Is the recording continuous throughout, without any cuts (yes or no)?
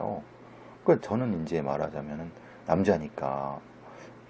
no